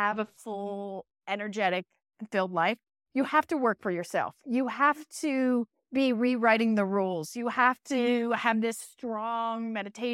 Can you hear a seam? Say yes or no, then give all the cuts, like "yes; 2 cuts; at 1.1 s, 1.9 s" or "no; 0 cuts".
no; 0 cuts